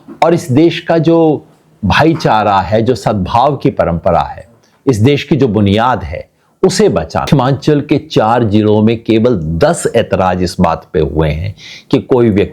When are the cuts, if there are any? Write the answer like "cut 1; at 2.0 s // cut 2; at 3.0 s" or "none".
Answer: cut 1; at 7.3 s